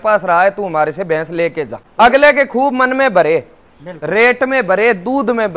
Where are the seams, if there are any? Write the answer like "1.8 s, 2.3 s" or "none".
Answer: 1.8 s